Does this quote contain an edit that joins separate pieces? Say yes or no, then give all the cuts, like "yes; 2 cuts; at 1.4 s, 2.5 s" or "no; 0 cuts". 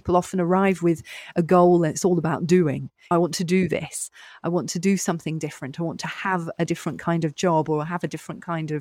no; 0 cuts